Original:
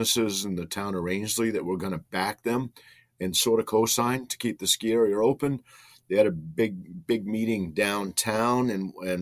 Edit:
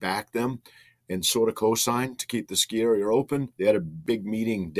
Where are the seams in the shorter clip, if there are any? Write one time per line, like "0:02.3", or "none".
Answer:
0:03.8